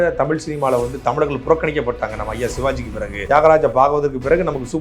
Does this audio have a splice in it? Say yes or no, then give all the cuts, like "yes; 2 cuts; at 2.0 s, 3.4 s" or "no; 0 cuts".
yes; 1 cut; at 3.2 s